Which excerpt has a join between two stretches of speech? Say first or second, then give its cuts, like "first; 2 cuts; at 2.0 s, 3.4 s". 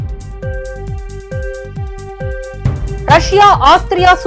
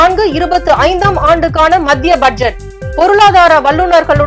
first; 1 cut; at 3.0 s